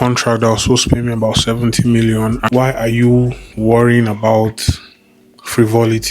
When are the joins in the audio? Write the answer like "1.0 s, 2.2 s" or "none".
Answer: 2.4 s